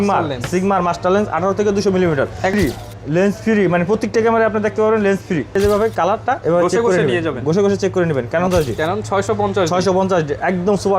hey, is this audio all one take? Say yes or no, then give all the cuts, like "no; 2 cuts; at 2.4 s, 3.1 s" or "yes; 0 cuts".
no; 3 cuts; at 2.5 s, 5.5 s, 8.5 s